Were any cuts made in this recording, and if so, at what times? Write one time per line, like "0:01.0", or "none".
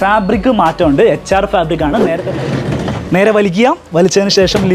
0:02.1